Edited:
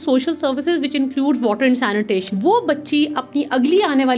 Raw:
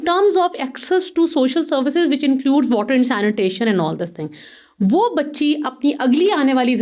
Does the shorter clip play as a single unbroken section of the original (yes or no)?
no